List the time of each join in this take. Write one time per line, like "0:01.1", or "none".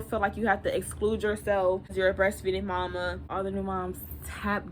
0:01.9
0:03.3